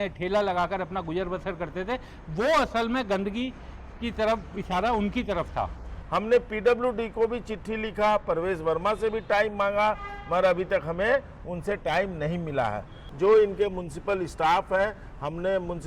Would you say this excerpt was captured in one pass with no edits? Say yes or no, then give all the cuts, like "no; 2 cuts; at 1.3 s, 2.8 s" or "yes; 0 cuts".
no; 2 cuts; at 5.9 s, 13.0 s